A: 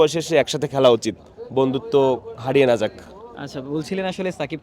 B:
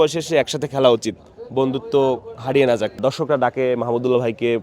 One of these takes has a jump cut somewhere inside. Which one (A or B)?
B